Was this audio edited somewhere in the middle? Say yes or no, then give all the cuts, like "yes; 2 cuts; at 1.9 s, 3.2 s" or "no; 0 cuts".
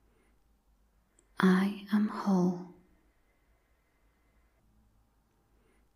yes; 1 cut; at 1.1 s